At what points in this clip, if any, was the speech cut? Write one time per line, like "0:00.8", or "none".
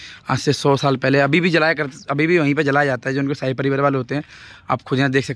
none